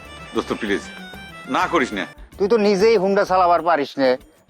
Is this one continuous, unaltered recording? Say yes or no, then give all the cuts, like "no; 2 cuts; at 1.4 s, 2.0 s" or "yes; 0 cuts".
no; 1 cut; at 2.2 s